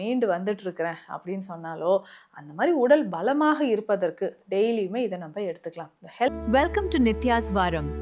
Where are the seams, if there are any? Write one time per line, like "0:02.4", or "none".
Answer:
0:06.3